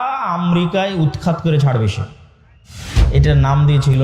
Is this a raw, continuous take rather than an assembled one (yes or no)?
no